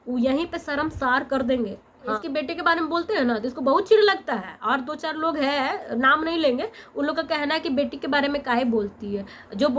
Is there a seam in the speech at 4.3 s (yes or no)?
no